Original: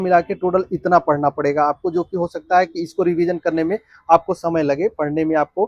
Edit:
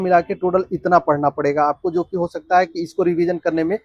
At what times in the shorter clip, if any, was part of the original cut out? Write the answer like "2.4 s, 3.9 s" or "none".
none